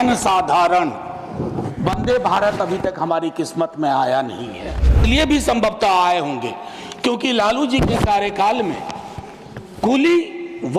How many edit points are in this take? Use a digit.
1